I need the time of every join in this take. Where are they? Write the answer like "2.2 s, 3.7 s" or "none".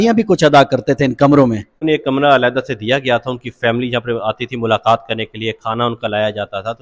1.8 s